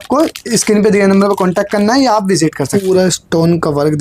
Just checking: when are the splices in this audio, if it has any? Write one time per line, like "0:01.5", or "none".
0:02.8